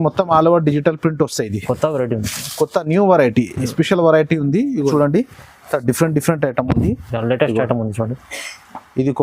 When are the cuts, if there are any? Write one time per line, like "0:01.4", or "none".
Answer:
0:04.9